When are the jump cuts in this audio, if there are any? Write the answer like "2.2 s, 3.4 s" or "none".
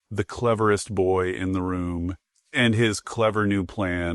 2.5 s